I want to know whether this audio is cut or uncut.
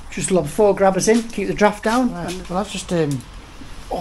cut